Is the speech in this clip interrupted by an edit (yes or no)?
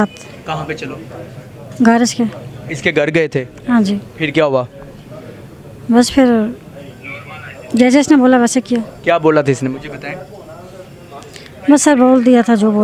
no